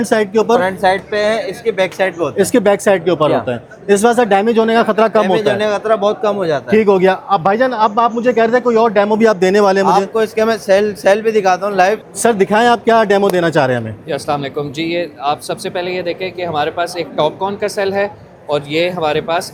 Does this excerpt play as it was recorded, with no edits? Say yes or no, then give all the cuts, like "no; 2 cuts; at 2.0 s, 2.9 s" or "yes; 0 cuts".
yes; 0 cuts